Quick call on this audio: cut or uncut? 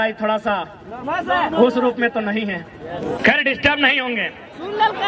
cut